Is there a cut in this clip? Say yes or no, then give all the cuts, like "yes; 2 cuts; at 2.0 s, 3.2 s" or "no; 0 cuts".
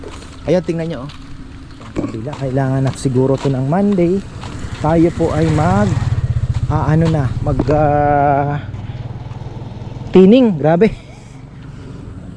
yes; 1 cut; at 2.2 s